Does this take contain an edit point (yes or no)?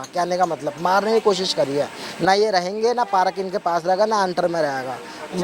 no